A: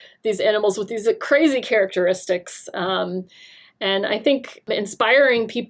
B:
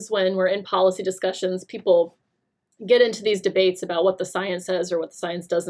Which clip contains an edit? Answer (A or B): A